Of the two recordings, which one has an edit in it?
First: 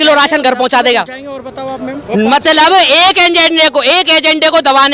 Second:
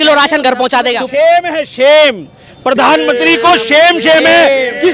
second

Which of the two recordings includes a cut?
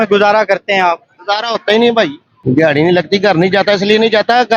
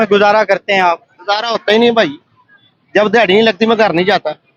first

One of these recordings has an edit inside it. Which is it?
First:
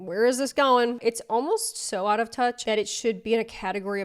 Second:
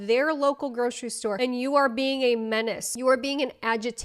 first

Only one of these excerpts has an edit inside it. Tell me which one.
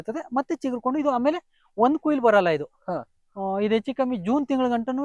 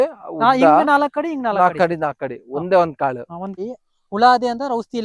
second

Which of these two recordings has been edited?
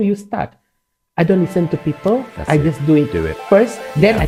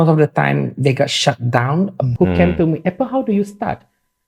second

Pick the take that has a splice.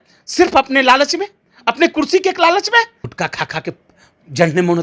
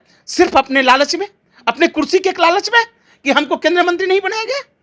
first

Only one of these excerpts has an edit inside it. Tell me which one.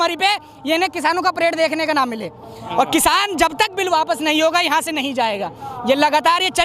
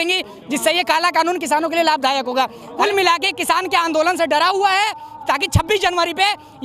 second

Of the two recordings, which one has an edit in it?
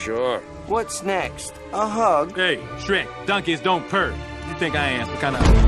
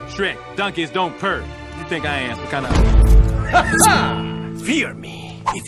first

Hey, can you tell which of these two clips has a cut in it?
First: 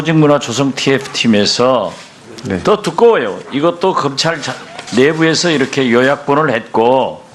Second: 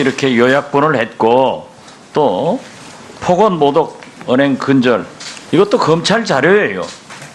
second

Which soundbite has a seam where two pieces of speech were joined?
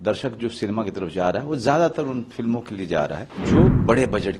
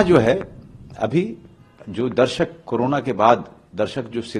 first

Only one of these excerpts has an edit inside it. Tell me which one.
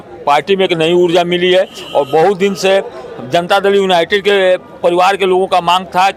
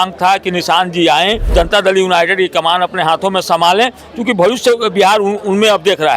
second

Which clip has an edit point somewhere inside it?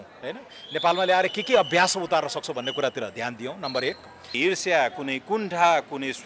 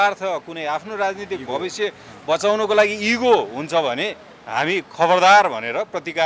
first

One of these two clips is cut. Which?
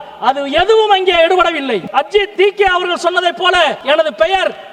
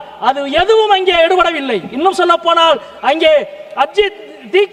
first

